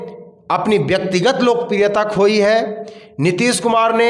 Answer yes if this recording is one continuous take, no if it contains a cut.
yes